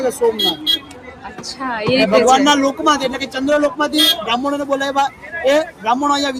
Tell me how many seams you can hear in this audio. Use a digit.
0